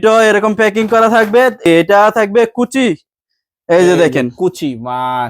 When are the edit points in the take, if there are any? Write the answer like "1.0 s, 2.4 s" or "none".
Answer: 1.7 s